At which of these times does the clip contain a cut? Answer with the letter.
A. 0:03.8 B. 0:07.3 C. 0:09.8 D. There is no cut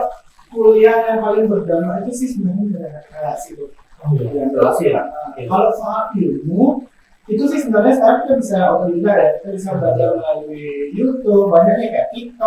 D